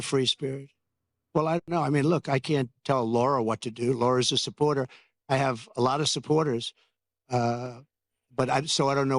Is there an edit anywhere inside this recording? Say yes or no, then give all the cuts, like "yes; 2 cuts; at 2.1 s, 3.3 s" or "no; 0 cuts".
yes; 1 cut; at 1.7 s